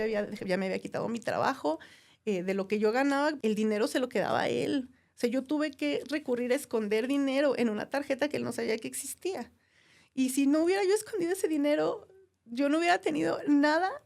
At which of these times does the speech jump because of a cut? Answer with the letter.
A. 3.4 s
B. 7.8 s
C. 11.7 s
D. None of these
A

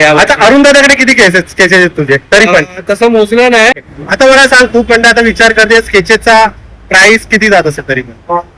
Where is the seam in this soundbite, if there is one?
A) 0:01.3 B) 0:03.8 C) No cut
B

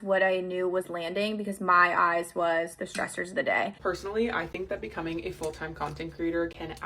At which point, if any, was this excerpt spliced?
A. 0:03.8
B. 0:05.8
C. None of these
A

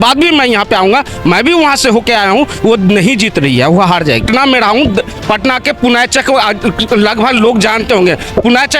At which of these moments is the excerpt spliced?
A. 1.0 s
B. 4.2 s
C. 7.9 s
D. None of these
B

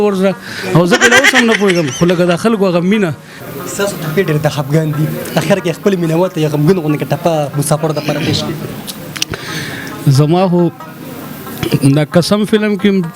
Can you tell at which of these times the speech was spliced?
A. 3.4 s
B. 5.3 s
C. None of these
A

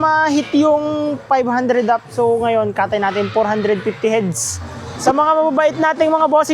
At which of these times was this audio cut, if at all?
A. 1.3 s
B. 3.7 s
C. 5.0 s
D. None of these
C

